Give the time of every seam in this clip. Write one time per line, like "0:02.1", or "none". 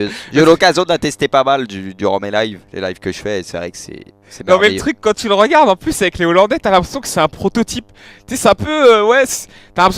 0:05.7